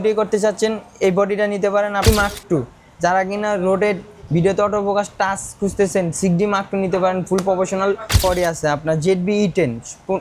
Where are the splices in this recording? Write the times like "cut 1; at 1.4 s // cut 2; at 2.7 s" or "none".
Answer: cut 1; at 2.1 s // cut 2; at 8.2 s